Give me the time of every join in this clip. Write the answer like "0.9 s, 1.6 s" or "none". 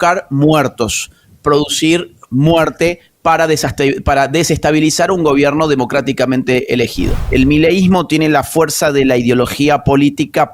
7.2 s